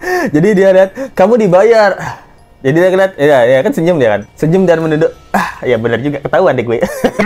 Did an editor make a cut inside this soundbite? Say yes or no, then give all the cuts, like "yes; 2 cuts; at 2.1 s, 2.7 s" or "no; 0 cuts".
no; 0 cuts